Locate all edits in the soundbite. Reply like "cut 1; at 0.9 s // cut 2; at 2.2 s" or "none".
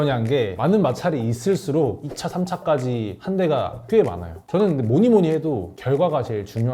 none